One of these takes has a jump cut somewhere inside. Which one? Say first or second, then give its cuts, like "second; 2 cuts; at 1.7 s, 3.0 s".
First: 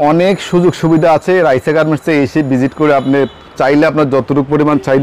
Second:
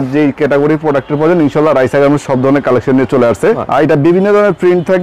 second; 1 cut; at 3.6 s